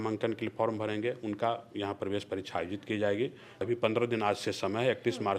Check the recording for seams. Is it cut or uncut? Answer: cut